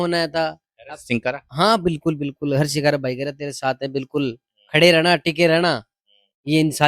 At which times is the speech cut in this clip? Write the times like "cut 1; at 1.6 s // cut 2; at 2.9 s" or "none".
none